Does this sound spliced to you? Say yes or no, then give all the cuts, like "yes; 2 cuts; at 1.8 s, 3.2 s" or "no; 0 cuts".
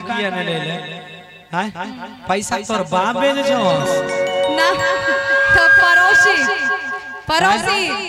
no; 0 cuts